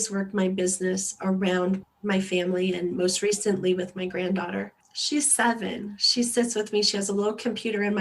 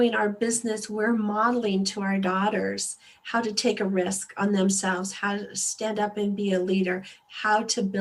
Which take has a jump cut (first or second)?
first